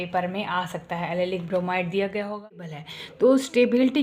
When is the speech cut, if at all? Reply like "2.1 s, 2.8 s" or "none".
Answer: 2.7 s